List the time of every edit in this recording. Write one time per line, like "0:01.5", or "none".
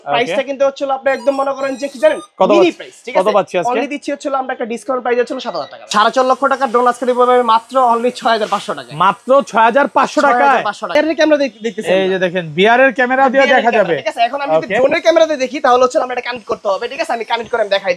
0:05.7
0:11.0